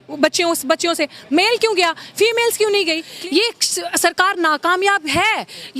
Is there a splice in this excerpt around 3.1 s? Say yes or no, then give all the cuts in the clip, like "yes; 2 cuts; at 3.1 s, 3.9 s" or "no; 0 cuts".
yes; 1 cut; at 3.1 s